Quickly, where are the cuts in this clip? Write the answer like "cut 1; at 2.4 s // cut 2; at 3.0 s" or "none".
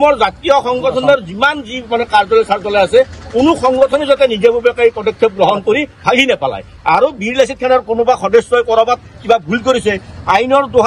none